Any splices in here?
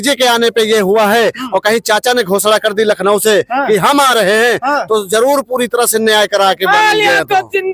no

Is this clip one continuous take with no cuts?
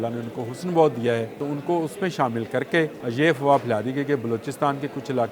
no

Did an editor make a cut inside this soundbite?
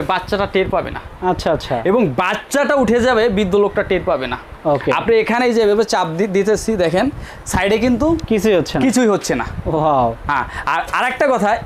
no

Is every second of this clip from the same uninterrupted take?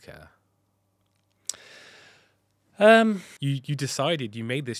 no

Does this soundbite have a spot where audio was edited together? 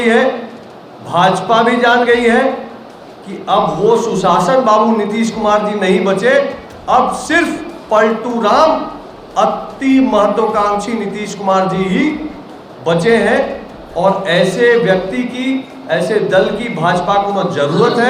no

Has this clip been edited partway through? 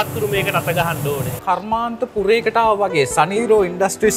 yes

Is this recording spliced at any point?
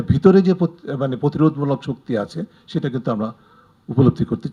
no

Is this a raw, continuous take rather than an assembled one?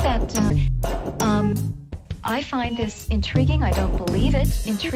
yes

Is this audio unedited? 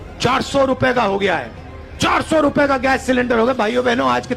yes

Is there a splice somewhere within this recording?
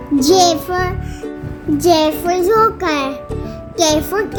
no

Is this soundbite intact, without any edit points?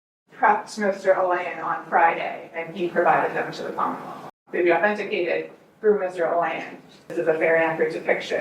no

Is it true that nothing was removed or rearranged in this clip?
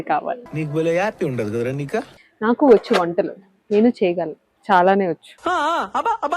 no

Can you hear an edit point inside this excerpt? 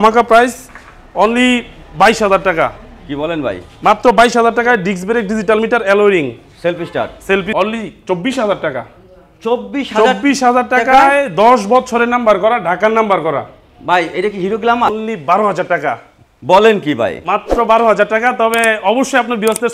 yes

